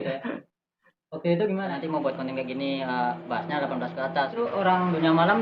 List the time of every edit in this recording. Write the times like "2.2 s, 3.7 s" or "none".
1.6 s, 4.3 s